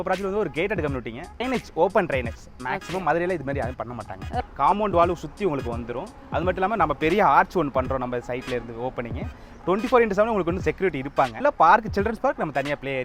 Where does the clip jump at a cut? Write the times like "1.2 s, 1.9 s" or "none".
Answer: 1.4 s, 4.3 s, 11.4 s